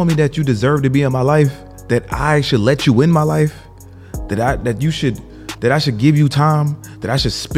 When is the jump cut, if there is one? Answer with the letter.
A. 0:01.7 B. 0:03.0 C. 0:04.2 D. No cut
A